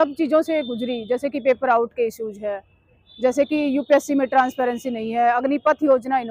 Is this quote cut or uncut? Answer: uncut